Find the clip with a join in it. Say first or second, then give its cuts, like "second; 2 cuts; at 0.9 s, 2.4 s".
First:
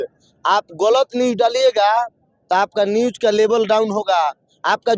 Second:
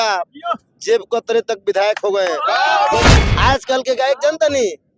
second; 1 cut; at 3.1 s